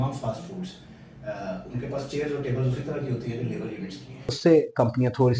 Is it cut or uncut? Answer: cut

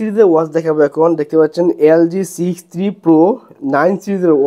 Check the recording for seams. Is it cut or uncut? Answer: uncut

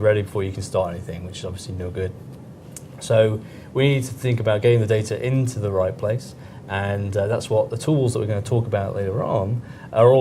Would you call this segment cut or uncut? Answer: cut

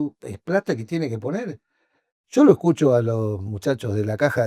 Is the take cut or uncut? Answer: uncut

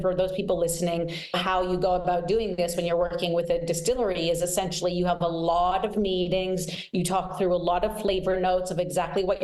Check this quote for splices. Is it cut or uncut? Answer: cut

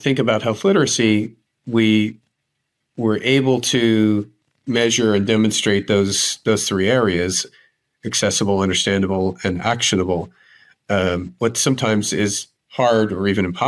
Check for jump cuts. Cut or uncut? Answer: uncut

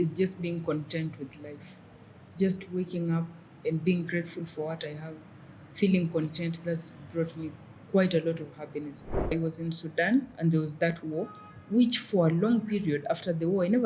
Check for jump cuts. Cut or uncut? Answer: cut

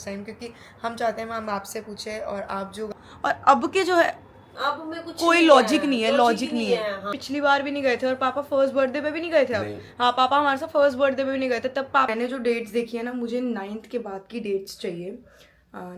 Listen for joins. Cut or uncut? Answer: cut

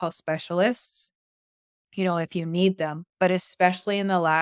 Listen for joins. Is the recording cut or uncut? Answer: cut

